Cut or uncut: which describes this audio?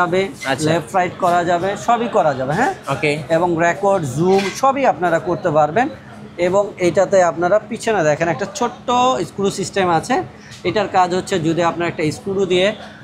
uncut